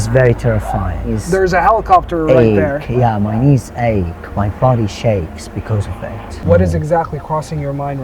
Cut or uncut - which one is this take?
cut